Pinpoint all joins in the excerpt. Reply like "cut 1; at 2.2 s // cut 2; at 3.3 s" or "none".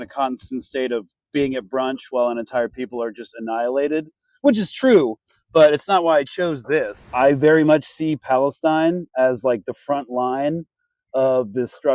cut 1; at 7.1 s